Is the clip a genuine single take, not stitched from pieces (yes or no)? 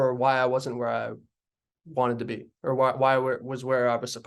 yes